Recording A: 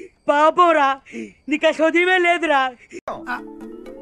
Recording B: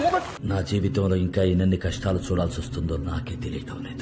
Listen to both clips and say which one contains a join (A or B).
A